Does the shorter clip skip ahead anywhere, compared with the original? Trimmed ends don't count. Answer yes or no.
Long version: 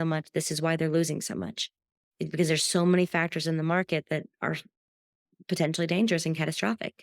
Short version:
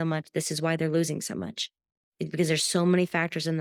no